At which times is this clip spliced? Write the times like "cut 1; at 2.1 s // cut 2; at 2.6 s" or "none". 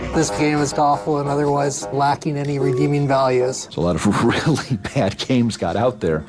cut 1; at 3.6 s